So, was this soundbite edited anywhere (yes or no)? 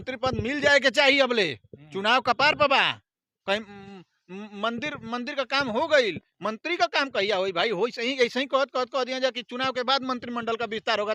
no